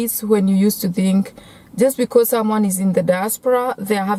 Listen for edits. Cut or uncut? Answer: uncut